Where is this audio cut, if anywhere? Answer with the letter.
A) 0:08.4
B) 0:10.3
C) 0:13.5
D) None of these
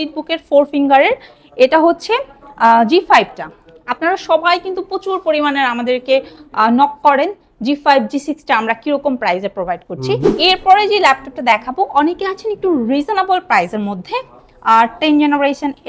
B